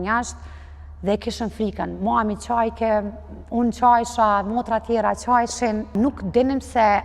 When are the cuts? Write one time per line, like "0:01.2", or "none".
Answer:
0:05.9